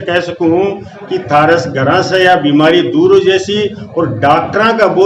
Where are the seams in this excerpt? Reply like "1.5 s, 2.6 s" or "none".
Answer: none